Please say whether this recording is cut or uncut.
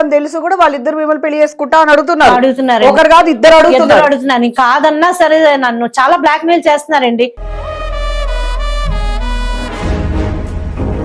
uncut